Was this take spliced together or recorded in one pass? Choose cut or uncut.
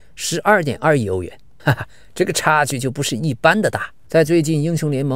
cut